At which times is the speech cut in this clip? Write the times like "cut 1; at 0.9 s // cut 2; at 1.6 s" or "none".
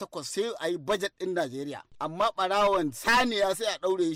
cut 1; at 1.9 s